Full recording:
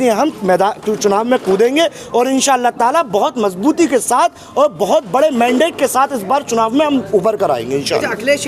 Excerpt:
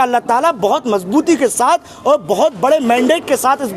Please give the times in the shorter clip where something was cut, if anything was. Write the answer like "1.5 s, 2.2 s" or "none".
none